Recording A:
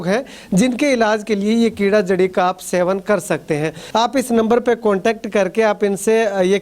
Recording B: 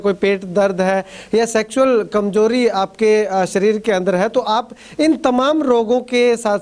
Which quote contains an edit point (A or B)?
A